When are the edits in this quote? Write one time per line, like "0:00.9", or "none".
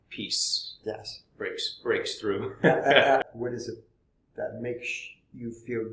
0:03.2